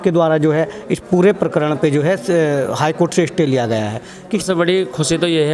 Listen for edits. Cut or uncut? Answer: cut